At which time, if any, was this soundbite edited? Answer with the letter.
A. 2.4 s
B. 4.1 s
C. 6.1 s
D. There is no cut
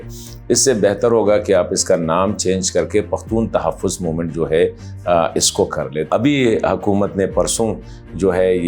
C